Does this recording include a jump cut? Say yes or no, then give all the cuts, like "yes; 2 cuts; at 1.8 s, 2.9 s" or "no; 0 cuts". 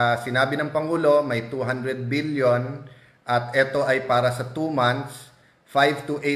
no; 0 cuts